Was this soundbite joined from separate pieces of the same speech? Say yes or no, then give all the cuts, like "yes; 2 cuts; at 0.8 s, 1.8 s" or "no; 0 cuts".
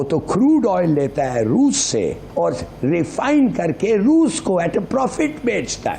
yes; 1 cut; at 2.2 s